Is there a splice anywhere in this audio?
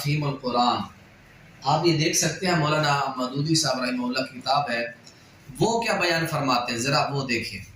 no; 0 cuts

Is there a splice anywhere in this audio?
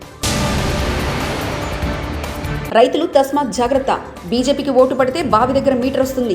yes; 1 cut; at 2.6 s

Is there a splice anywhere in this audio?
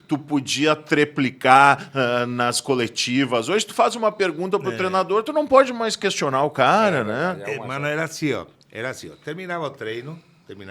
no; 0 cuts

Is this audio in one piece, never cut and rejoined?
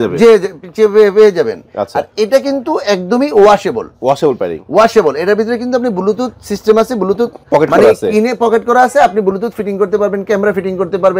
yes; 0 cuts

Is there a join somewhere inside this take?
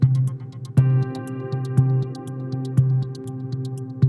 no; 0 cuts

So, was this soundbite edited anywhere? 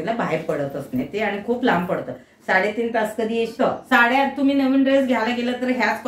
yes; 1 cut; at 3.5 s

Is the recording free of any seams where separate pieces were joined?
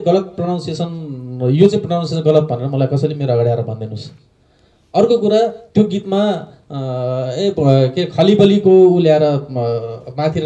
yes; 0 cuts

